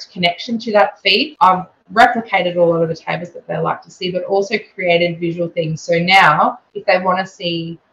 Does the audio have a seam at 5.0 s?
no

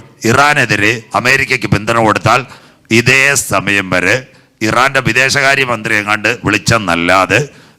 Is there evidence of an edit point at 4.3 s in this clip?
no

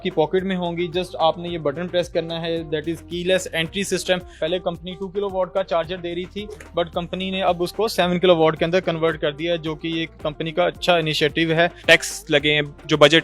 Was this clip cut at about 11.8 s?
yes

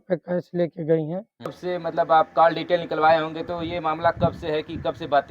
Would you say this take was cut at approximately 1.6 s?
yes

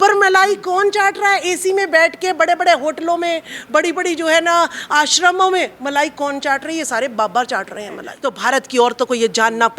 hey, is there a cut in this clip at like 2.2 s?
no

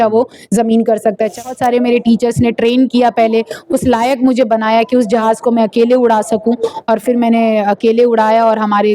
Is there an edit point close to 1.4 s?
yes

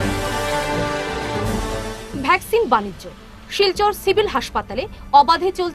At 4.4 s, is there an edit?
no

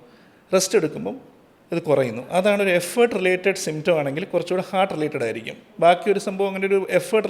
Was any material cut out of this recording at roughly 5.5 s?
no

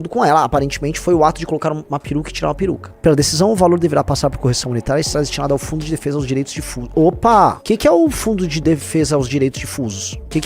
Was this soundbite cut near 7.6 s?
yes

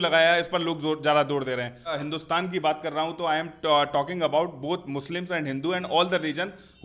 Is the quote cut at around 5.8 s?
no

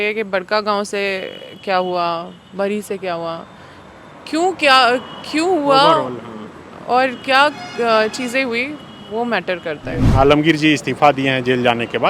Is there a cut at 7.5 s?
no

